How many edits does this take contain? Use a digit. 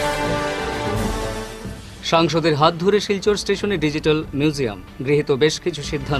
1